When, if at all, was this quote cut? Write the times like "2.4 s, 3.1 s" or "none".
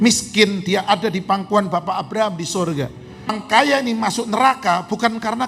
3.4 s